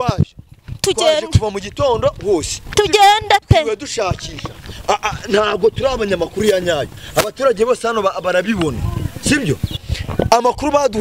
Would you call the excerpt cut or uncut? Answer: cut